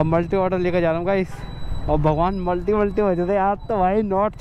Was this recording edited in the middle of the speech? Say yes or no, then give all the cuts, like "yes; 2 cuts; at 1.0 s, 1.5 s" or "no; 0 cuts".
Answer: no; 0 cuts